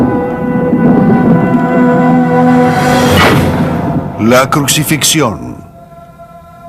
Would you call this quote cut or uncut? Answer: cut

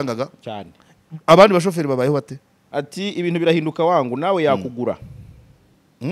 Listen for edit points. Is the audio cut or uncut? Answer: cut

